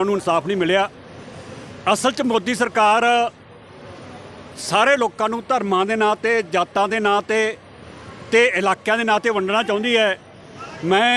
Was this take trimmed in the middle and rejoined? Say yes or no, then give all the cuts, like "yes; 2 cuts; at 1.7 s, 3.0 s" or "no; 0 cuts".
no; 0 cuts